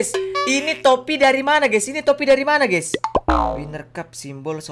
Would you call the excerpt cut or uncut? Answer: cut